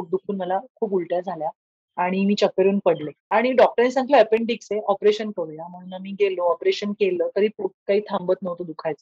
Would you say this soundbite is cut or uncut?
cut